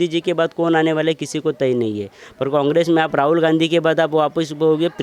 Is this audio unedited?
yes; 0 cuts

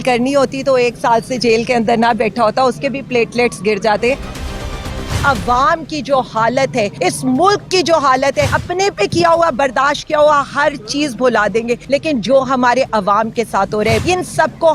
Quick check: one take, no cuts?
no; 5 cuts; at 4.8 s, 6.9 s, 8.6 s, 11.8 s, 14.0 s

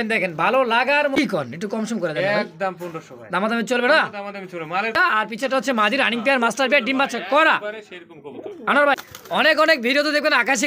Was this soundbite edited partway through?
yes; 3 cuts; at 1.2 s, 5.0 s, 9.0 s

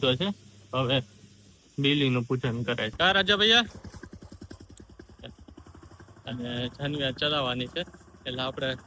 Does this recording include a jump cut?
yes; 1 cut; at 2.9 s

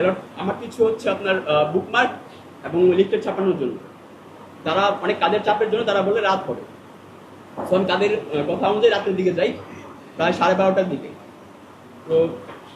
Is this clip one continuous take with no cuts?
yes; 0 cuts

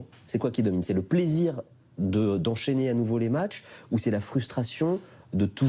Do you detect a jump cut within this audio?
no; 0 cuts

